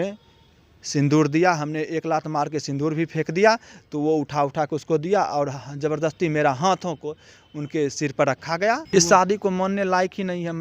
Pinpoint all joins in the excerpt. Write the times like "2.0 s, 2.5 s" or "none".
8.8 s